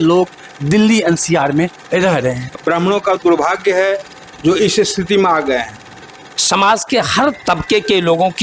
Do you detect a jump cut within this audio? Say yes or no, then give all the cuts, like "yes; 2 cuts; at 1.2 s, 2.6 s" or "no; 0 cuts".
yes; 2 cuts; at 2.6 s, 6.1 s